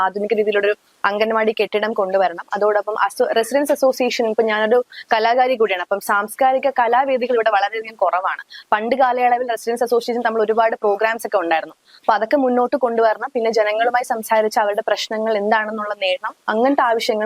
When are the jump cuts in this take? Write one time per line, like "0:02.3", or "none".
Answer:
none